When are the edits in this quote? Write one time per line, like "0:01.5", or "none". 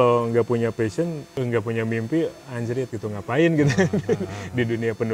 0:01.3